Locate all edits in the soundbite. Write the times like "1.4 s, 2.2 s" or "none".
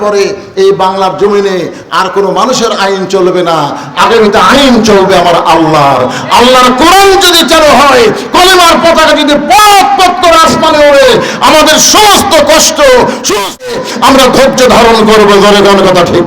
13.7 s